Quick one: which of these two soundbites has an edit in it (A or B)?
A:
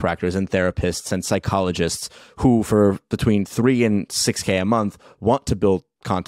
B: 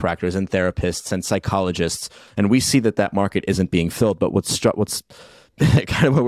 B